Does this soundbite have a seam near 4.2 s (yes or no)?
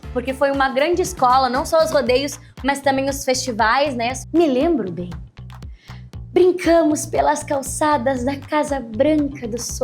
yes